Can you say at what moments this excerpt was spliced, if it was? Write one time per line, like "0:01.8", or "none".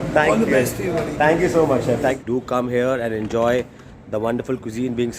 0:02.2